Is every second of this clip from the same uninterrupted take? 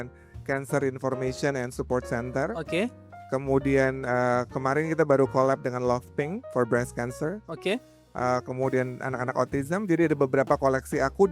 yes; 0 cuts

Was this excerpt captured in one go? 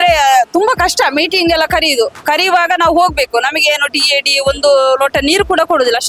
yes; 0 cuts

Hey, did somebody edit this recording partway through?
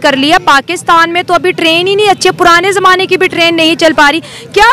no; 0 cuts

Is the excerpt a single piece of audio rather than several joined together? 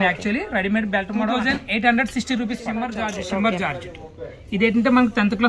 no; 2 cuts; at 1.3 s, 3.2 s

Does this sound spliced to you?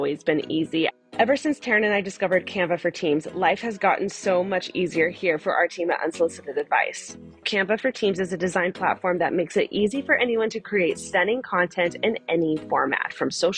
yes; 2 cuts; at 0.9 s, 7.4 s

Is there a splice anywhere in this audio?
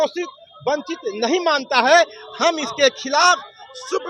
no; 0 cuts

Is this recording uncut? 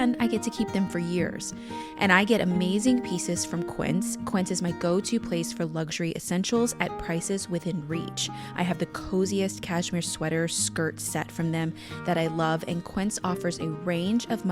yes; 0 cuts

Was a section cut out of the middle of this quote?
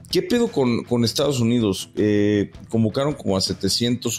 no; 0 cuts

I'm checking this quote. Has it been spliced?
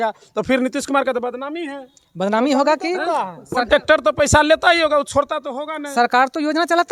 no; 0 cuts

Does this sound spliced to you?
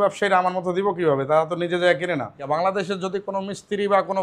yes; 1 cut; at 2.4 s

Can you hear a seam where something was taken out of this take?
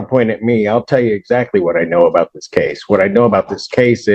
no; 0 cuts

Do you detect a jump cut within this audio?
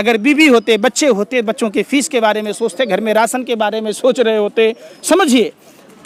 no; 0 cuts

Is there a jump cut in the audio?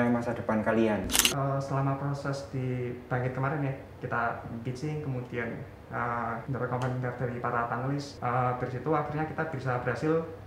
yes; 3 cuts; at 1.2 s, 6.4 s, 8.1 s

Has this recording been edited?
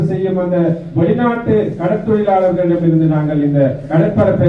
no; 0 cuts

